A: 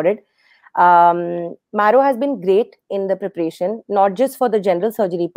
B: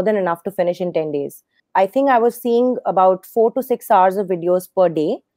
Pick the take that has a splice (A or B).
B